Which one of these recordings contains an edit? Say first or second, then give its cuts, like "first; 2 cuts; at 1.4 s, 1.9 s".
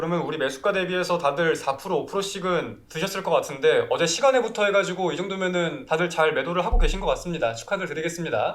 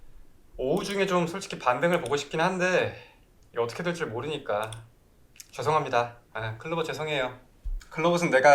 first; 2 cuts; at 2.8 s, 5.8 s